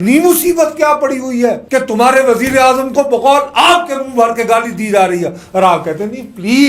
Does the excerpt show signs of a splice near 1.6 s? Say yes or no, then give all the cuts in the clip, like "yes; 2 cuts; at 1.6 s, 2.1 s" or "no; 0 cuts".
yes; 1 cut; at 1.6 s